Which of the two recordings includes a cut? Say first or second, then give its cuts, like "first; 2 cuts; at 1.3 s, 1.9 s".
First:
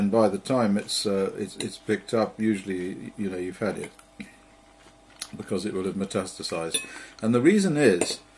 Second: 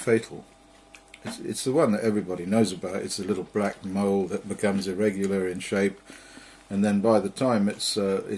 second; 1 cut; at 5.6 s